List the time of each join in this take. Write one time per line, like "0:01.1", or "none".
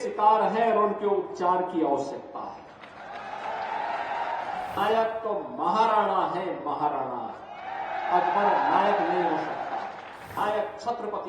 0:04.8
0:10.3